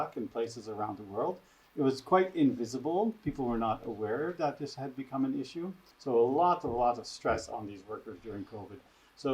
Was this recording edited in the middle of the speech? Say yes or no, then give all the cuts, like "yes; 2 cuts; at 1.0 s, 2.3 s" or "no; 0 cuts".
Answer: yes; 1 cut; at 5.9 s